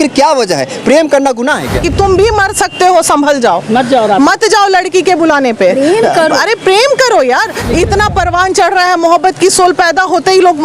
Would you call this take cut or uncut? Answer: cut